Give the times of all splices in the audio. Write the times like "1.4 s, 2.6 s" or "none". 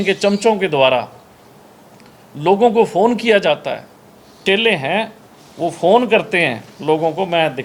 4.4 s